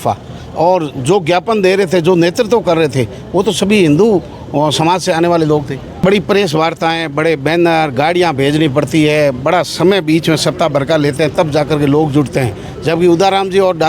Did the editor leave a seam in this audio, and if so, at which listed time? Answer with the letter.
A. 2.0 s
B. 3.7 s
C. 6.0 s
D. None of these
C